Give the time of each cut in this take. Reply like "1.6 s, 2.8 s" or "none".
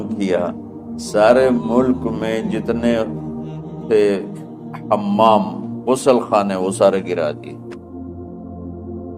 7.5 s